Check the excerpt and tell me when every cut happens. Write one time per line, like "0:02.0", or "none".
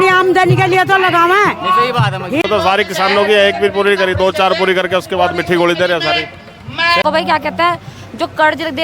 0:02.4
0:07.0